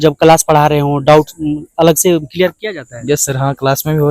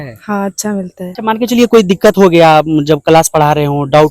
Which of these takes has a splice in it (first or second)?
second